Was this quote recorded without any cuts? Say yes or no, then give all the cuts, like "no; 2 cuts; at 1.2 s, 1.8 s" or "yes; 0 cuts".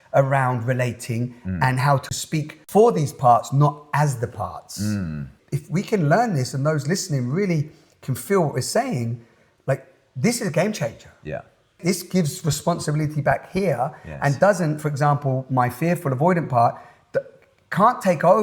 no; 3 cuts; at 2.2 s, 5.4 s, 11.7 s